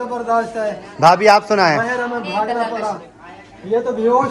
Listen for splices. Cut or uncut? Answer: cut